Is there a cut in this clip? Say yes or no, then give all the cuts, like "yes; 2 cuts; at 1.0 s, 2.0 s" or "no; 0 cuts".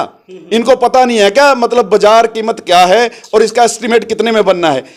no; 0 cuts